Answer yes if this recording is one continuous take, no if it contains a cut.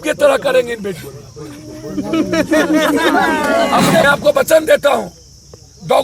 no